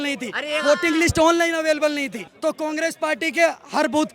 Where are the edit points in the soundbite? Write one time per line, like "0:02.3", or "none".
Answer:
0:02.2